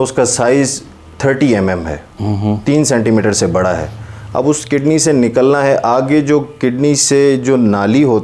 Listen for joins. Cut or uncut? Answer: uncut